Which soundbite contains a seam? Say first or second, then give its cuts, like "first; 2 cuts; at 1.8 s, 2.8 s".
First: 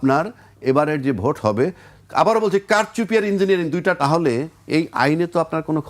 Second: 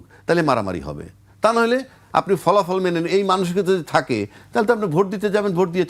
first; 1 cut; at 4.0 s